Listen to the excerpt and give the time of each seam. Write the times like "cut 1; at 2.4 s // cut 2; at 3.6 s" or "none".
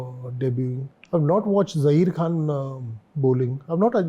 cut 1; at 0.9 s

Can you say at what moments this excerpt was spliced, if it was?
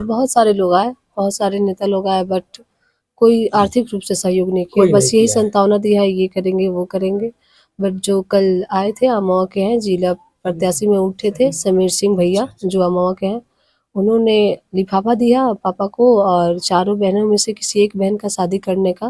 none

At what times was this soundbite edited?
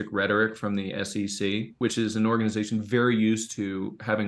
cut 1; at 1.7 s

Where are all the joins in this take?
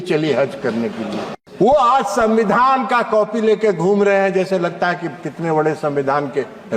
cut 1; at 1.4 s

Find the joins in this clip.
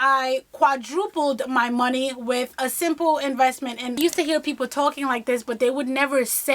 cut 1; at 3.9 s

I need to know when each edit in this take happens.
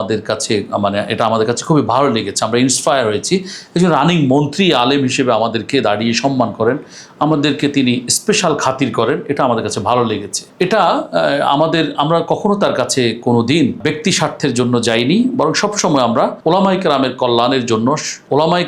none

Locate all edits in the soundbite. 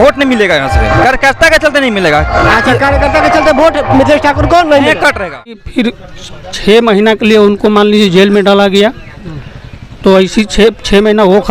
cut 1; at 5.6 s

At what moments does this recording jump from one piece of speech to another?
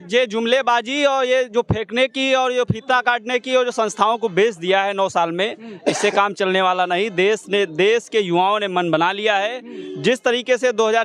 none

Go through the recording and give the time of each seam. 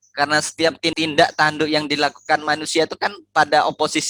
cut 1; at 0.9 s

